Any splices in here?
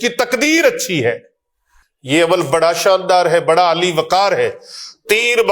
no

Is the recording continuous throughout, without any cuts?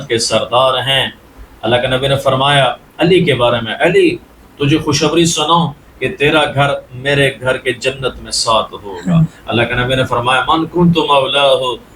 yes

